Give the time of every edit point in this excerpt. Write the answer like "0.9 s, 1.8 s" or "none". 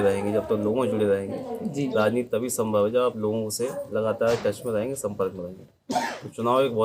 none

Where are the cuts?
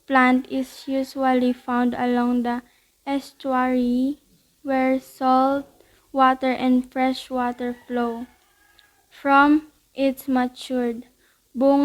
none

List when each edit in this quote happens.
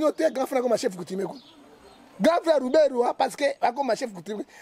none

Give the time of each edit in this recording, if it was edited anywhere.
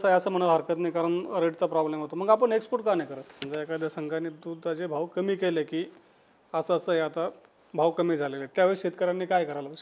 3.4 s

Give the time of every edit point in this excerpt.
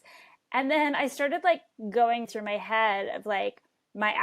2.3 s

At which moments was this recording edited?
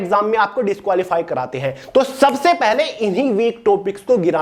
none

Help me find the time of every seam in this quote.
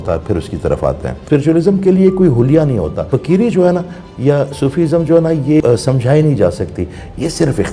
1.1 s, 3.1 s, 5.6 s

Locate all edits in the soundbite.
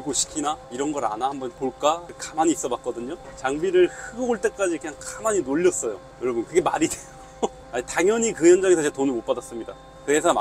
3.3 s, 6.0 s, 7.6 s

